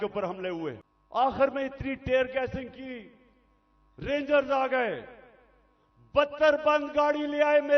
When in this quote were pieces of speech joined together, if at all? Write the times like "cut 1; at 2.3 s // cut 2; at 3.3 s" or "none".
cut 1; at 0.9 s